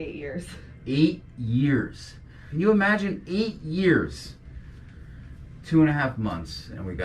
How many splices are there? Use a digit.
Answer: 1